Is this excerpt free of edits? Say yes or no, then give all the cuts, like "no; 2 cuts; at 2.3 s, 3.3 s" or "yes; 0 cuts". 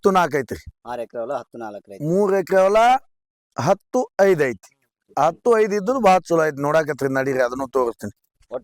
yes; 0 cuts